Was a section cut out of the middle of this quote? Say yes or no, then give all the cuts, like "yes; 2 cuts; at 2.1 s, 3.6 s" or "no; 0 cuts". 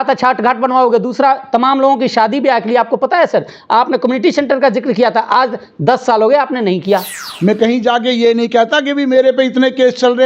yes; 1 cut; at 7.2 s